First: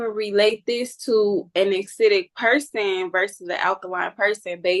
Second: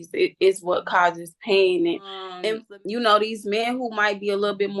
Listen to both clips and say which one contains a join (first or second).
second